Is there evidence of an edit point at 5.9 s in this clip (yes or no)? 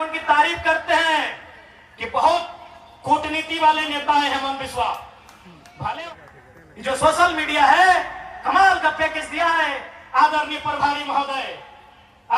yes